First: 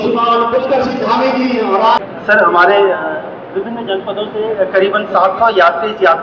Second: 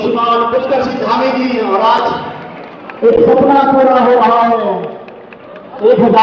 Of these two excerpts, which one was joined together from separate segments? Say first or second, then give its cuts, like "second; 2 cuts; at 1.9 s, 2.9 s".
first; 1 cut; at 2.0 s